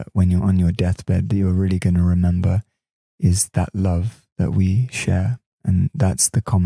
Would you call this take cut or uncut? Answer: cut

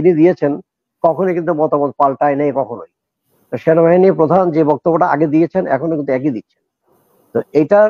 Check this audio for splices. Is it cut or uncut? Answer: uncut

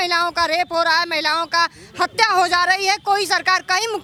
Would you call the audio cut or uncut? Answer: uncut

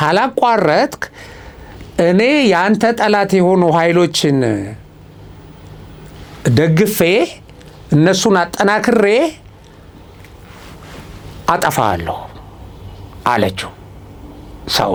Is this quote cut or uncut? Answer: uncut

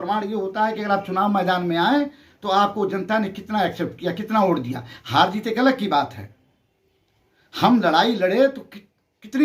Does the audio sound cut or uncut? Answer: uncut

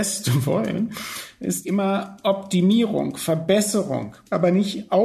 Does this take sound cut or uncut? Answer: cut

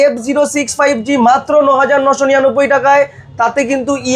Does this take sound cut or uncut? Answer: uncut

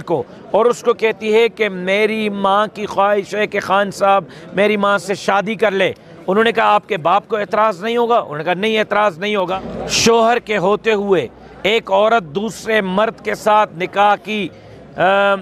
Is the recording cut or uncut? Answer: cut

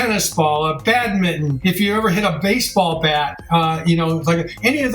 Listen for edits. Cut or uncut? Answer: cut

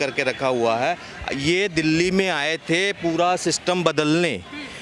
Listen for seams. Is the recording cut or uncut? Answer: uncut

